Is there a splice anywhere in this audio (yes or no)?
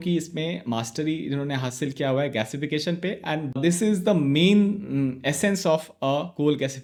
no